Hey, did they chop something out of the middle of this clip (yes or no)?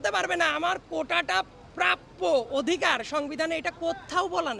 no